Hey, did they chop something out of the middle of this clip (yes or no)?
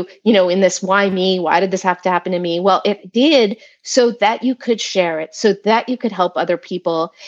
no